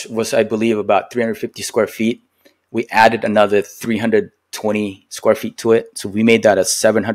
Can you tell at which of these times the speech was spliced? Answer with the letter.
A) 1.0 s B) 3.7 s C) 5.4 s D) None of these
D